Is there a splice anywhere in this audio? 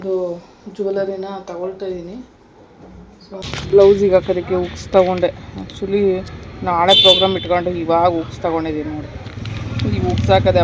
yes; 1 cut; at 3.5 s

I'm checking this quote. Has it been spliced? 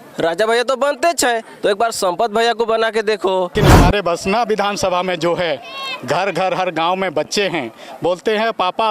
yes; 1 cut; at 3.5 s

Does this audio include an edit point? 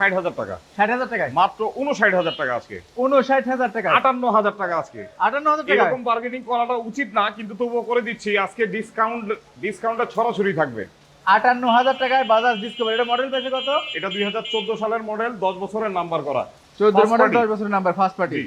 no; 0 cuts

